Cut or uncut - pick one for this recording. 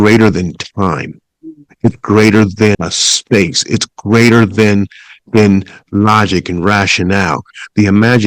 cut